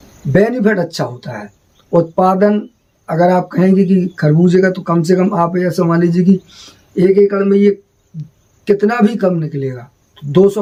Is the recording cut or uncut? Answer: uncut